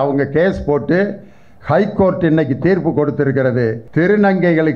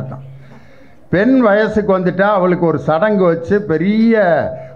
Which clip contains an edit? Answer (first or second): first